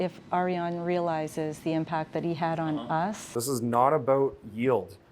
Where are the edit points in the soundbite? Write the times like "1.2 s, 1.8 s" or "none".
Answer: 3.3 s